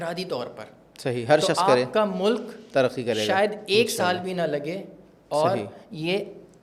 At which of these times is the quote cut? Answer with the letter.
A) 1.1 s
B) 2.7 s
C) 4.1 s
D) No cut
D